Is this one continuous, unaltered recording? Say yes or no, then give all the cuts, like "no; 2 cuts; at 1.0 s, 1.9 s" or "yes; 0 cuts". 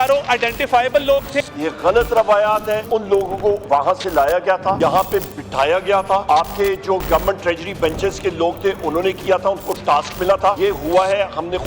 no; 5 cuts; at 1.3 s, 2.8 s, 4.8 s, 6.2 s, 10.6 s